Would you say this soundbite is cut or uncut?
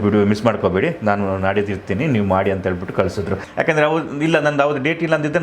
cut